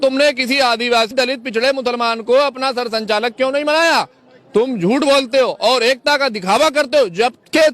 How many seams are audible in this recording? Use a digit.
1